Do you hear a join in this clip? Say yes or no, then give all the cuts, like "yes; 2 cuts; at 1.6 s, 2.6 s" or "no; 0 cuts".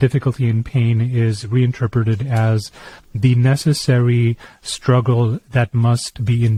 no; 0 cuts